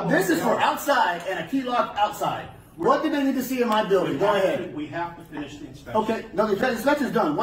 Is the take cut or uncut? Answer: uncut